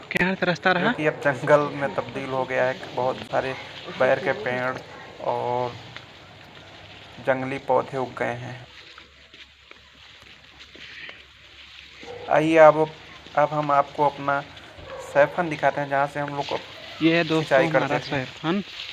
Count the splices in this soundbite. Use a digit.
0